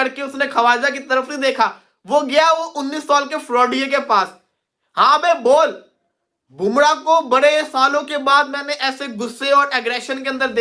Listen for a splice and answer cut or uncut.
uncut